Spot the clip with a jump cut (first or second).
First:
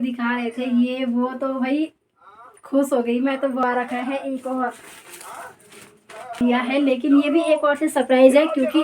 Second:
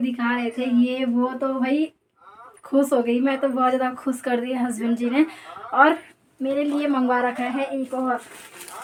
first